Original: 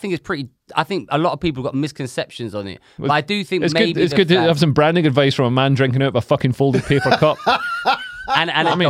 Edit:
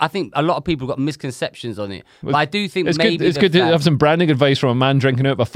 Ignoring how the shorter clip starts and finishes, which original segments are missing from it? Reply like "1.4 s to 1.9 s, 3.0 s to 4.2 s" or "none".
none